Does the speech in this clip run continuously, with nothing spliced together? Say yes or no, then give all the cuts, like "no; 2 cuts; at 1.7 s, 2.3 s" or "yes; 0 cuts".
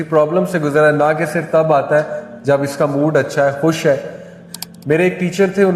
no; 1 cut; at 4.3 s